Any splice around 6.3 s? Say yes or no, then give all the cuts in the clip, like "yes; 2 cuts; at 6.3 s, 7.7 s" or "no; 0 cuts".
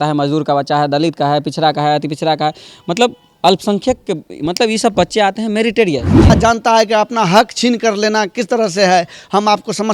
yes; 1 cut; at 6.3 s